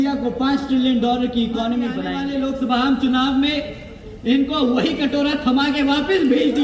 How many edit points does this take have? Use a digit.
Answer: 1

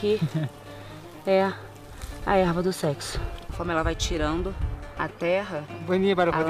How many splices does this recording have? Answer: 1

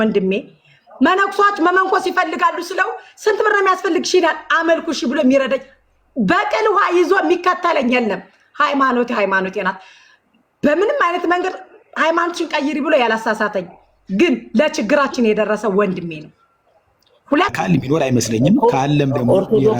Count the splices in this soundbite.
1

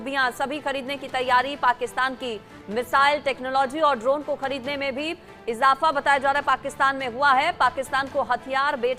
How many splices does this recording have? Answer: 0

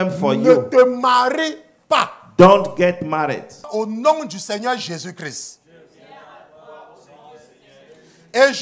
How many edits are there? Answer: 1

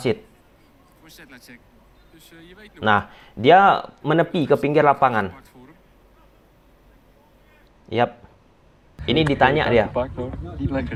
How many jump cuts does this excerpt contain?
0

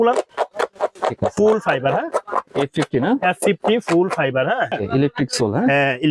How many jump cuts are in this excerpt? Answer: 1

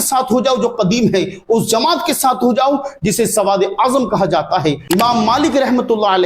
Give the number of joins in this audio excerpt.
1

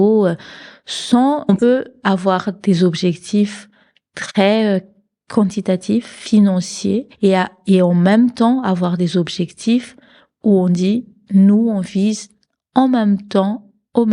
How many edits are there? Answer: 2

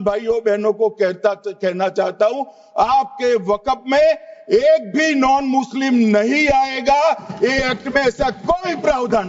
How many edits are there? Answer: 0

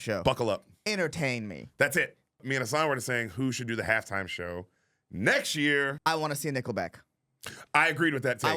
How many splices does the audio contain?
2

